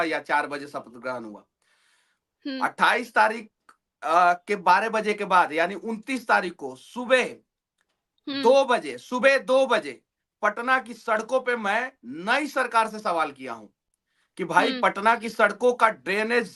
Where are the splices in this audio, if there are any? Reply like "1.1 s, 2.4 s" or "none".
none